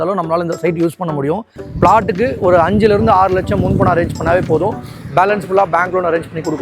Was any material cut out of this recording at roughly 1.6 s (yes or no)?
yes